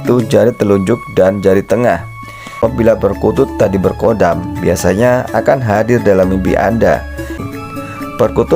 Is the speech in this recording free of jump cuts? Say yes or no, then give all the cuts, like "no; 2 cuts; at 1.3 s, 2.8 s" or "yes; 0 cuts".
no; 2 cuts; at 2.5 s, 7.5 s